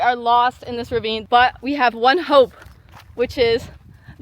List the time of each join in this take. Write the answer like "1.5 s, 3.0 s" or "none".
1.2 s

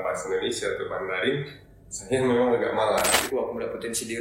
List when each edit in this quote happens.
3.3 s

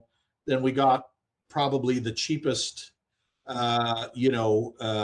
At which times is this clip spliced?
none

